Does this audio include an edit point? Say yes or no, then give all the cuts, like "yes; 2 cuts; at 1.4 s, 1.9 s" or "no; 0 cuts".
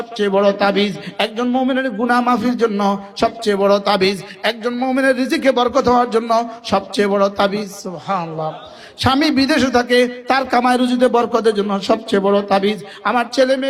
no; 0 cuts